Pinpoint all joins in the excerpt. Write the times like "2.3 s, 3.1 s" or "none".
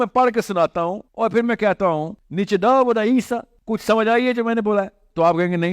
1.0 s, 2.2 s, 3.5 s